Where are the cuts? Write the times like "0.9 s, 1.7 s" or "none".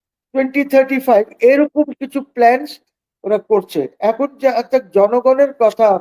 none